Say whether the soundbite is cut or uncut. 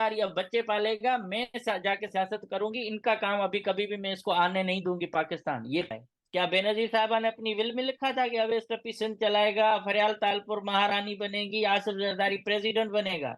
cut